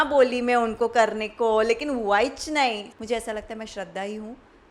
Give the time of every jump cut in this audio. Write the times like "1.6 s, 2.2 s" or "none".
2.9 s